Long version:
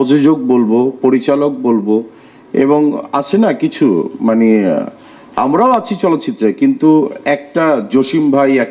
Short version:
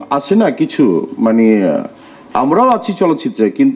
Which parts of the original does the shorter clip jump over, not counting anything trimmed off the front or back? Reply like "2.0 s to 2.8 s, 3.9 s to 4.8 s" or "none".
none